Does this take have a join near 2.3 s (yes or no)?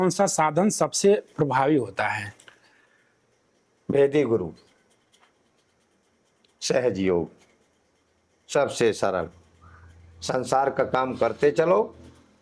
no